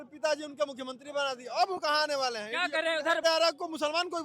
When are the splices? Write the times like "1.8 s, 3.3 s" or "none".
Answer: 3.2 s